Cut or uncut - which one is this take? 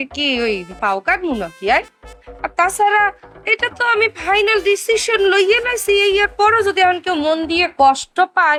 uncut